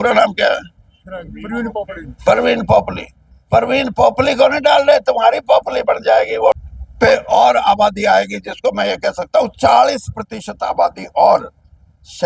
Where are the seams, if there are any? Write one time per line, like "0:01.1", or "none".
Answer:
0:06.7